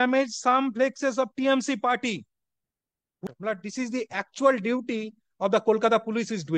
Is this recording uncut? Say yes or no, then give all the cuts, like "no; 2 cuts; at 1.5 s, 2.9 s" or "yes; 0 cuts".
no; 1 cut; at 3.2 s